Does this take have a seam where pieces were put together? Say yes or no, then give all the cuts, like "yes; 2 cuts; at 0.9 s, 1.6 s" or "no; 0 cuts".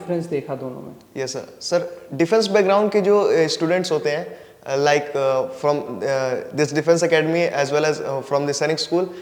no; 0 cuts